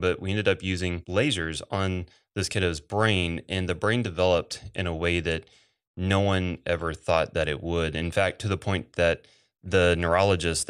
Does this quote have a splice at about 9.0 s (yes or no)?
no